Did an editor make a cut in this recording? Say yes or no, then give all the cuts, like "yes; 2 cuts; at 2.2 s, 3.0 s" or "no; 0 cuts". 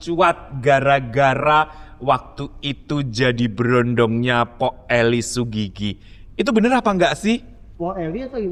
no; 0 cuts